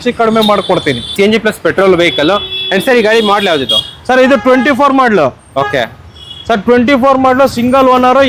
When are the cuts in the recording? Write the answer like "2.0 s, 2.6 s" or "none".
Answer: 1.1 s